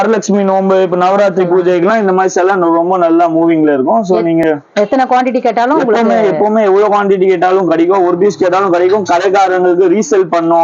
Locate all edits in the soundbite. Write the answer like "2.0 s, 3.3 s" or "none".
none